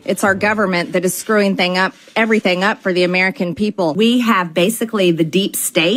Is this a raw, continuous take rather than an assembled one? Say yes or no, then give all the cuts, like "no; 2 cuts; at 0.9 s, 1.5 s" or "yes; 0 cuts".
no; 1 cut; at 4.0 s